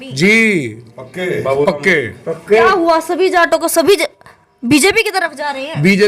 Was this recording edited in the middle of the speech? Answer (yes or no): no